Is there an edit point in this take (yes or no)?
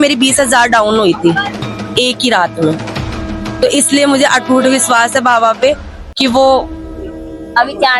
no